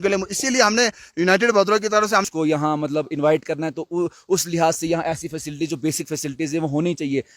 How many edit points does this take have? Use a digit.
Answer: 1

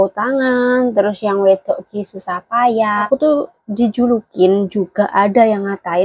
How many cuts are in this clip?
1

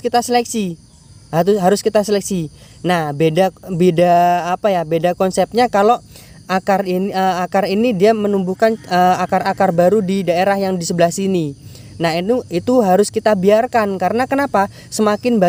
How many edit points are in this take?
0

